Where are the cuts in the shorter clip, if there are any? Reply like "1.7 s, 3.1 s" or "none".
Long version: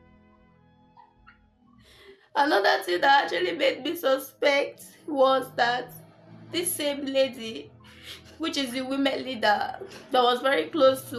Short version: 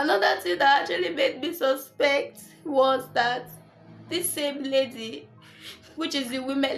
none